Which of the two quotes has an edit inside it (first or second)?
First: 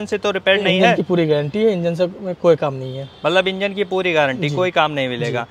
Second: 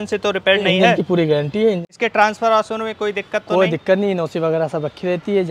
second